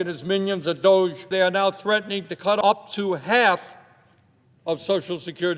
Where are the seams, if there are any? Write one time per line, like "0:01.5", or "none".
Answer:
0:01.3
0:02.6

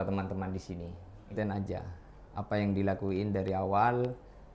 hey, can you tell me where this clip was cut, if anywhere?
0:01.3

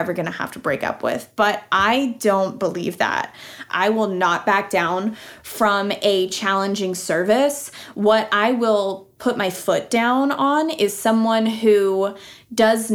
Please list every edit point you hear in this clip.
0:03.6

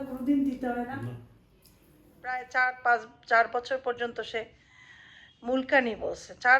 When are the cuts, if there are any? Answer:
0:02.5

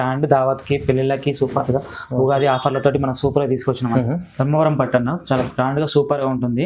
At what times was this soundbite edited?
0:03.9

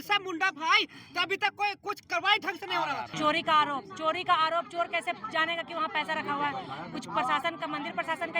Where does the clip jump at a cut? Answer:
0:03.1

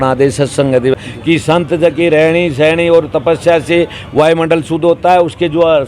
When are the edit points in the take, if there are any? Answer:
0:00.9

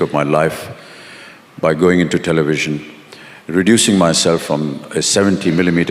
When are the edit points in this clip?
none

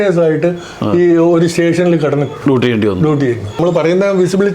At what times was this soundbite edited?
0:03.6

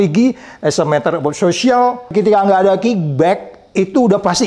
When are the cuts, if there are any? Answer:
0:02.1

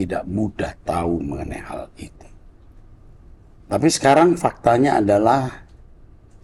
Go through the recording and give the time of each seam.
none

